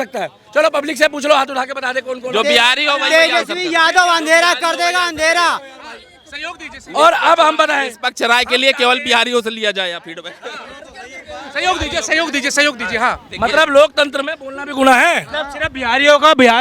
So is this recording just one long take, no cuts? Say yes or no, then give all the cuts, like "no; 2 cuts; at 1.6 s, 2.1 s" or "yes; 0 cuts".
yes; 0 cuts